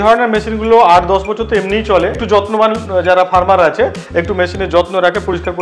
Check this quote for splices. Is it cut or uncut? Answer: cut